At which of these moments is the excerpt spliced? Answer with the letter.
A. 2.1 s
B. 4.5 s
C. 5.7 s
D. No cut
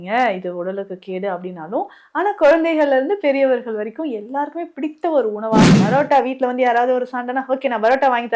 C